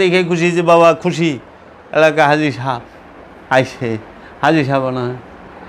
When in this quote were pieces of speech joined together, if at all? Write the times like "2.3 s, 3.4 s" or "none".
none